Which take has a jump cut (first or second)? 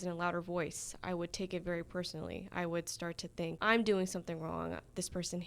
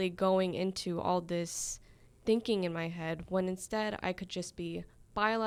first